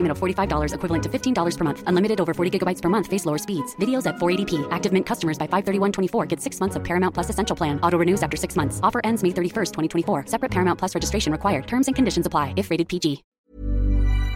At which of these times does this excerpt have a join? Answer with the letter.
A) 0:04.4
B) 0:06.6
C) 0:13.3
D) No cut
C